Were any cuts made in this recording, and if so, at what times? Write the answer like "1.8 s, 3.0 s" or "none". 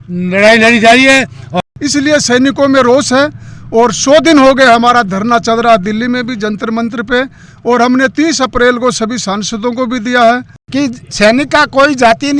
1.5 s, 10.6 s

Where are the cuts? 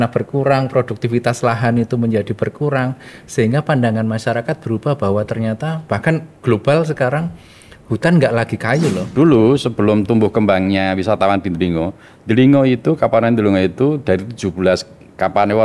9.0 s

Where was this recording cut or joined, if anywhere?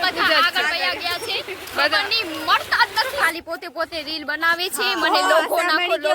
3.2 s

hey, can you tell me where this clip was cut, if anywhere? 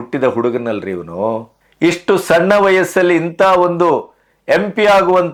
none

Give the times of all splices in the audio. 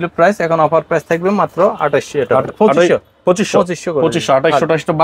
none

